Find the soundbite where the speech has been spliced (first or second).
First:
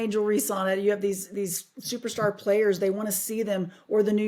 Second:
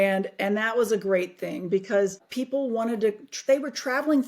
second